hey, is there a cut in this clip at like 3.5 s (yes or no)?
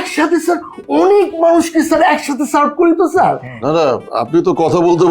yes